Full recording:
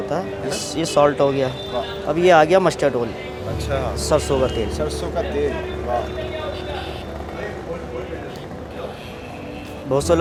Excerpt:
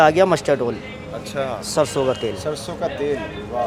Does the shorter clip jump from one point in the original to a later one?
no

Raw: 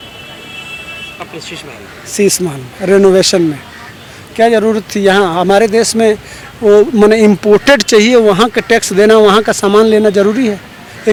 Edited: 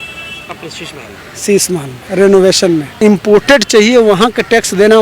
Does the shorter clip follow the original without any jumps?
no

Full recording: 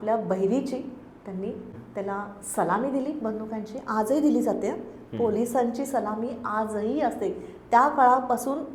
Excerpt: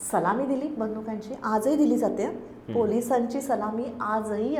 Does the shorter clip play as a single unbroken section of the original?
yes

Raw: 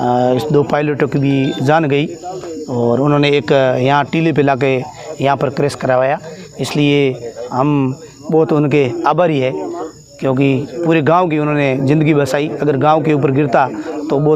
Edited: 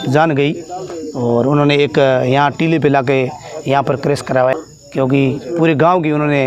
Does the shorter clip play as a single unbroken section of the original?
no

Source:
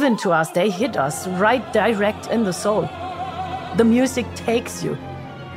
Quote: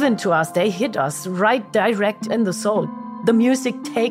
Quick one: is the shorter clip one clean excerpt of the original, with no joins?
no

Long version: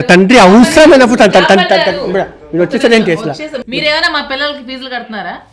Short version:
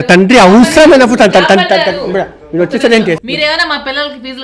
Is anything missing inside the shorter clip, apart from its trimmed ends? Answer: yes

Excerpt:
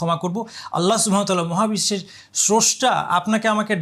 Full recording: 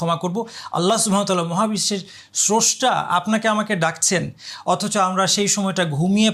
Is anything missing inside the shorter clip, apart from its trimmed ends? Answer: no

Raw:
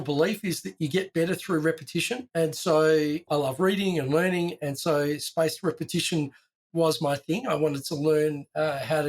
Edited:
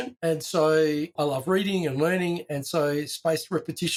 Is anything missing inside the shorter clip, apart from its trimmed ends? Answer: no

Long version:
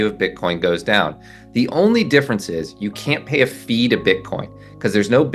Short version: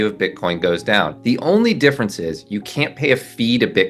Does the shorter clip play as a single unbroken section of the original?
no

